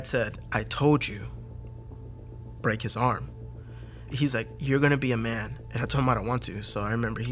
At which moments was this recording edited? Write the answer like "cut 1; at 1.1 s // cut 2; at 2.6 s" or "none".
cut 1; at 4.1 s